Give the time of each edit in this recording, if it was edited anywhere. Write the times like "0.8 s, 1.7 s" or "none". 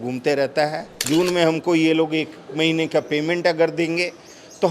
1.0 s